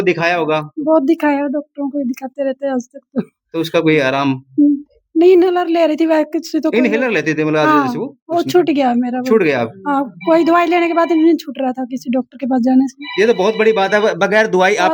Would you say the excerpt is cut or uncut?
uncut